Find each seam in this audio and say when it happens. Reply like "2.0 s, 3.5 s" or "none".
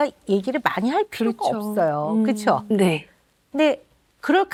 none